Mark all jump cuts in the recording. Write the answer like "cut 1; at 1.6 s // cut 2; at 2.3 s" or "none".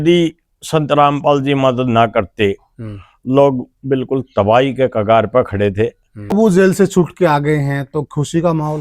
cut 1; at 6.3 s